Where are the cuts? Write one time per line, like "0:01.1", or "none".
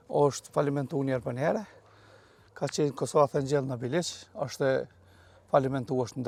none